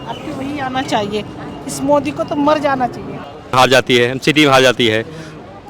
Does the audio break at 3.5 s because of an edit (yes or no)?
yes